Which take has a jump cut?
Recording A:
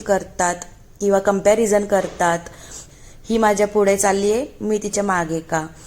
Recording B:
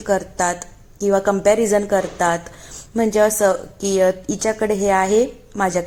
A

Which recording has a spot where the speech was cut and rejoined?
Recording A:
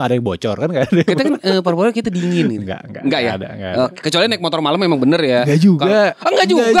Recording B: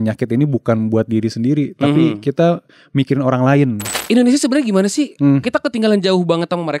B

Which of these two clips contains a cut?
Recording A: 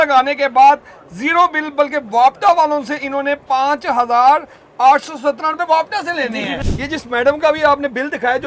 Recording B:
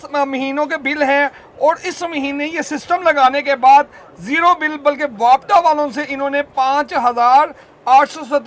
A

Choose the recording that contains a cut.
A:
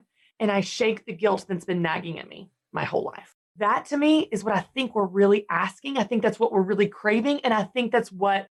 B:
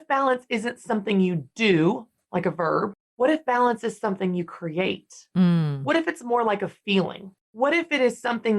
B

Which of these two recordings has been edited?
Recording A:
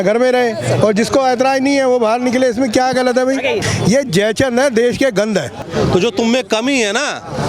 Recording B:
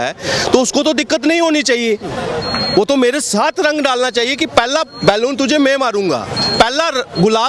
A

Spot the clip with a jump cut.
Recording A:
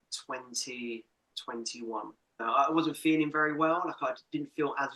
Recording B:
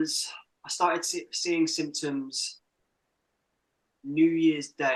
A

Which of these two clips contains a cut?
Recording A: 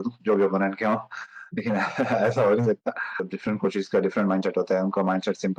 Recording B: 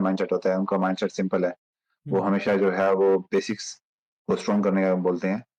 A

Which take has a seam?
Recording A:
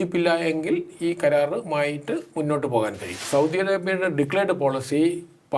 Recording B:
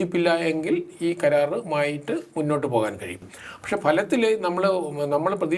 A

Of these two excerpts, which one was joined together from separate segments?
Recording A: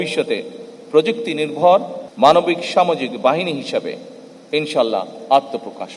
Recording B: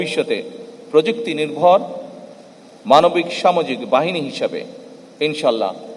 A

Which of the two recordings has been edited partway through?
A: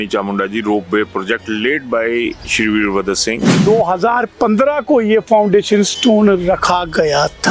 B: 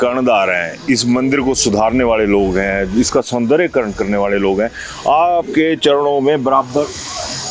A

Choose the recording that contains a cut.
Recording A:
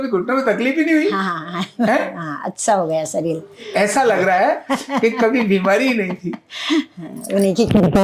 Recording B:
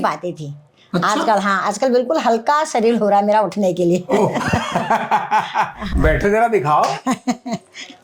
B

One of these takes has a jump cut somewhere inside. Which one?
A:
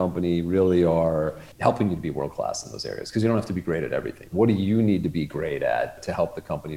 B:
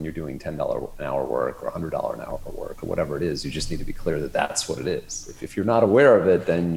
A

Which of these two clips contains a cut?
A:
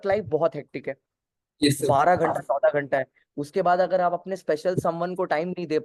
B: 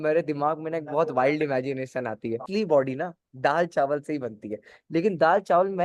B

